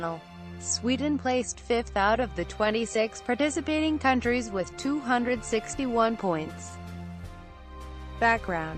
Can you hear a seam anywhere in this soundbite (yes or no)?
no